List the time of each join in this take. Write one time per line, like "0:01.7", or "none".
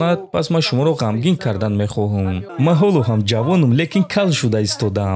0:02.4